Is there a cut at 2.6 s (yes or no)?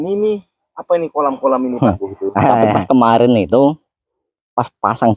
yes